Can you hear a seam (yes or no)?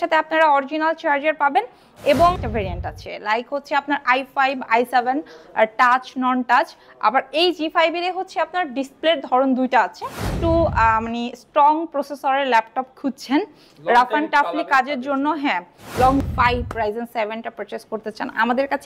yes